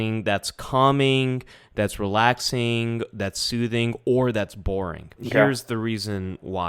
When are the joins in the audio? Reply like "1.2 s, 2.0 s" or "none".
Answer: 5.2 s